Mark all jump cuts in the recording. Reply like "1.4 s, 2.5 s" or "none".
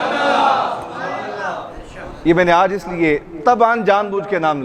none